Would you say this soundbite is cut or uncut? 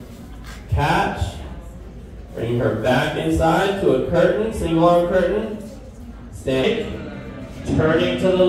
cut